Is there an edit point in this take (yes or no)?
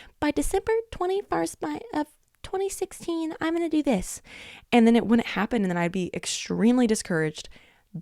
no